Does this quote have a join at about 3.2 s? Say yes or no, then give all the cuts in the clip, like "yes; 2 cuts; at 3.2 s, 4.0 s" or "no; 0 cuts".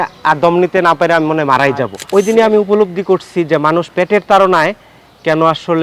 no; 1 cut; at 2.0 s